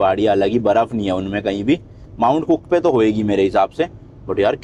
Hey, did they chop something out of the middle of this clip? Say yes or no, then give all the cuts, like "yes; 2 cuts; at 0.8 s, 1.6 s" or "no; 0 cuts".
no; 0 cuts